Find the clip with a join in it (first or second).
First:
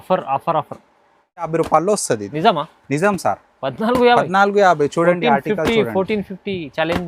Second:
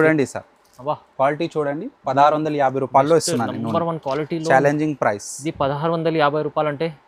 first